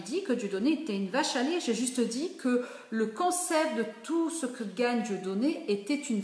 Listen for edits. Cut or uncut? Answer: cut